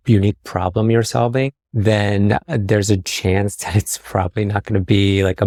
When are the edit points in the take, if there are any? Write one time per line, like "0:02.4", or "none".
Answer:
none